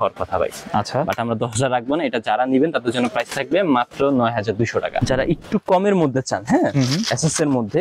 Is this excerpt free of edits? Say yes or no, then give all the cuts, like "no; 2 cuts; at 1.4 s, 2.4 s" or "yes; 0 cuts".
no; 1 cut; at 5.0 s